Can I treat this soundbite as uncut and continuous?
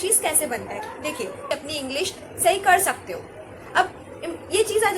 no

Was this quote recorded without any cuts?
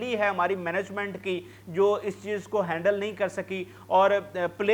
yes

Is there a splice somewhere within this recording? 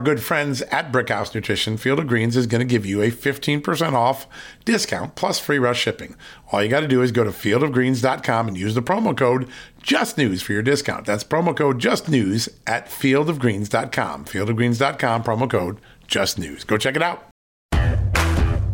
yes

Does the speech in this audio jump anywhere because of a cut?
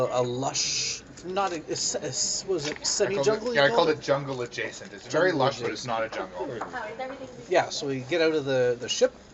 no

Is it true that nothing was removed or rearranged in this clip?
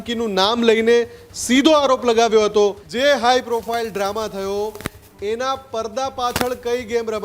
no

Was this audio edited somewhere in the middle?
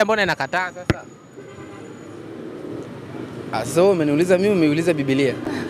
no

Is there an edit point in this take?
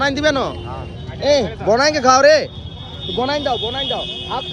no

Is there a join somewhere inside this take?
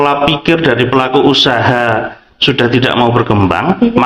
no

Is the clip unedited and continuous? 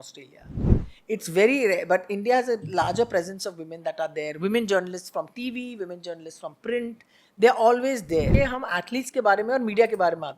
no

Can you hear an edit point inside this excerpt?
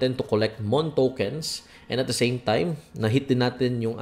no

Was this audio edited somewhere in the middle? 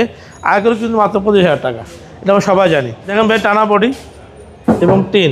yes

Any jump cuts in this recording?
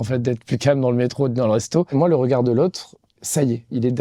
yes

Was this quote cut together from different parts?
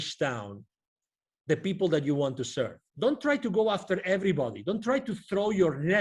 yes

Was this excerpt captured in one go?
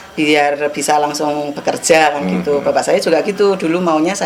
yes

